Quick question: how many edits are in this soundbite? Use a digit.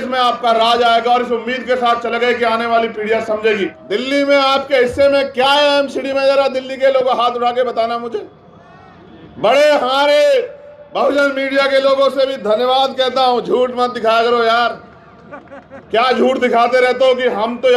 1